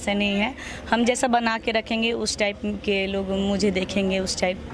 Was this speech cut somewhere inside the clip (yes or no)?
no